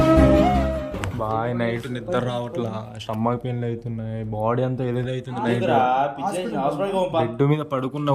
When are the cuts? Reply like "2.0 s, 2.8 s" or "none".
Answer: 1.1 s